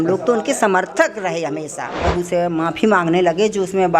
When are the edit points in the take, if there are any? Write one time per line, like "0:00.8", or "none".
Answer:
0:02.0